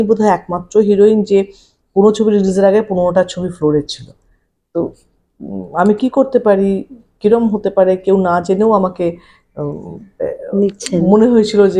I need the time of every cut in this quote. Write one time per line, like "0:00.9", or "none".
none